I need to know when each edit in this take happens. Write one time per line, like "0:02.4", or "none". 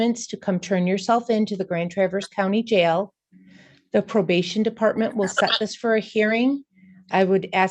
none